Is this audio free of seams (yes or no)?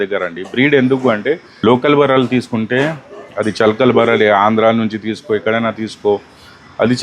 no